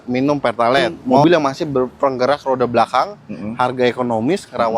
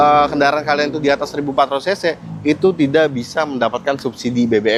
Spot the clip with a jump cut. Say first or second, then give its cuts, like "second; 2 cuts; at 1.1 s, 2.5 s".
first; 1 cut; at 1.2 s